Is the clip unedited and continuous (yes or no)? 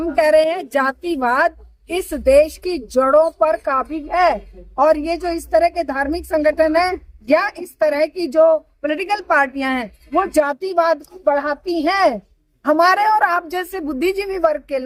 yes